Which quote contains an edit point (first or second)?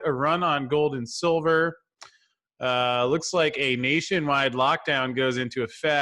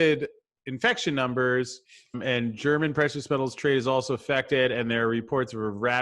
second